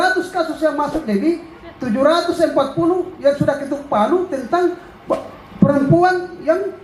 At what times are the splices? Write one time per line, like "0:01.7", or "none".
none